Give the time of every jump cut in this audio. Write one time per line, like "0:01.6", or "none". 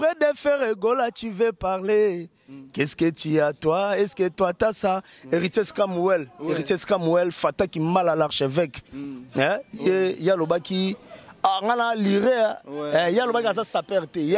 none